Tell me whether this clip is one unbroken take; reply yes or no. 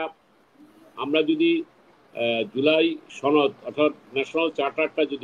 yes